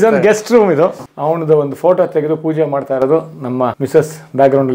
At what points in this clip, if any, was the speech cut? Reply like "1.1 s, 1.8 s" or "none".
1.1 s, 3.8 s